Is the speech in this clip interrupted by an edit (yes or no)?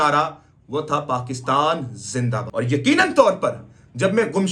yes